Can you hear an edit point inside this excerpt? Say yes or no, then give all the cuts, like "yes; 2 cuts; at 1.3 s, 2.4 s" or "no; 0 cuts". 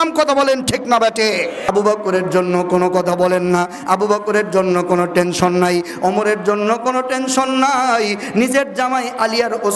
yes; 1 cut; at 1.6 s